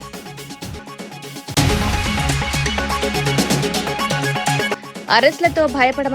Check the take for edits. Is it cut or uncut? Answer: cut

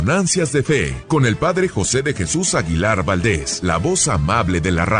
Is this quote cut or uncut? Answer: cut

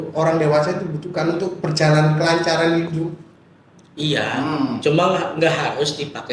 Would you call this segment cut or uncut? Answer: uncut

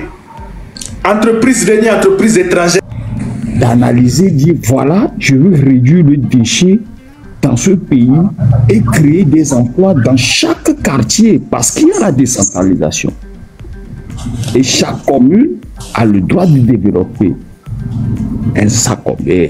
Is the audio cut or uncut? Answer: cut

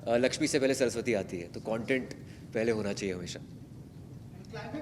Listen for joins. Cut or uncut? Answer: uncut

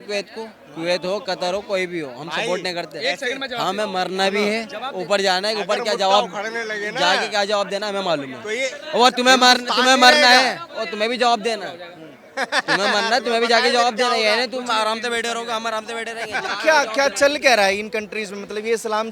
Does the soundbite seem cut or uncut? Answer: uncut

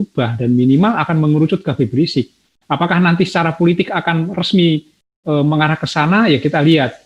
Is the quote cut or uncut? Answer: uncut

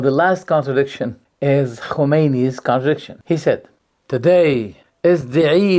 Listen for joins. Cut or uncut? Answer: cut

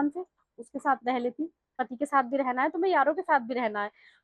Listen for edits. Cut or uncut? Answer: cut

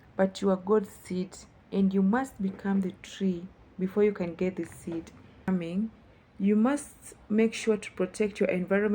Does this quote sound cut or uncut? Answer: cut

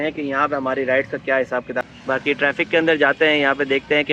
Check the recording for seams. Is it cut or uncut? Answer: cut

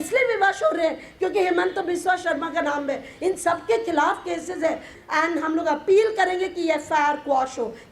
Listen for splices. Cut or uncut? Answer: cut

